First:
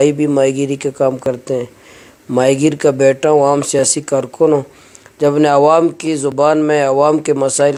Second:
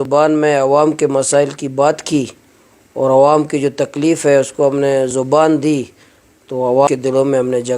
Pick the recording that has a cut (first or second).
second